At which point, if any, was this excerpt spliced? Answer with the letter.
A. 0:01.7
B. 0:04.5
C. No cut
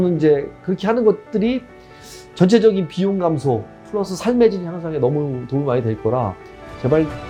C